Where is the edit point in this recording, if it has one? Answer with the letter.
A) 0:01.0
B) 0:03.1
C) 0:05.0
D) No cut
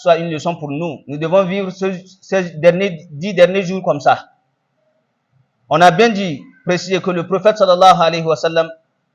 A